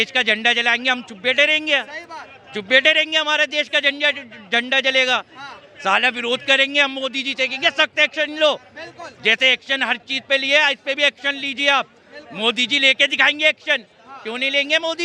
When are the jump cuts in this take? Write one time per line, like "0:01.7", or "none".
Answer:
none